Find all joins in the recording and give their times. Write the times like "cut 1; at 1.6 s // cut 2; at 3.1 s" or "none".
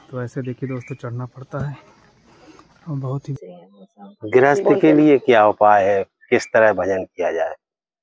cut 1; at 3.4 s